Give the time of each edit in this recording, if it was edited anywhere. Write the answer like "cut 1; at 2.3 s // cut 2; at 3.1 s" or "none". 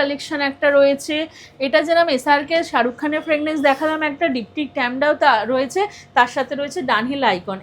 cut 1; at 1.4 s